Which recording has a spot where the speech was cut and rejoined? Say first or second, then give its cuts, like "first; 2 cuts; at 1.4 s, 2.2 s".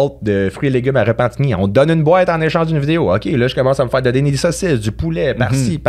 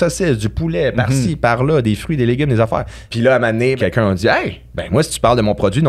second; 2 cuts; at 3.0 s, 3.8 s